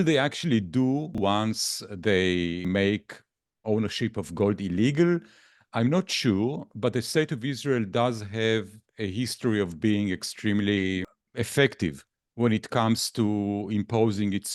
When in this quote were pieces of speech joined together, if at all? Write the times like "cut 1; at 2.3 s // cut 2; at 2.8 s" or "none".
cut 1; at 1.2 s // cut 2; at 2.6 s // cut 3; at 11.2 s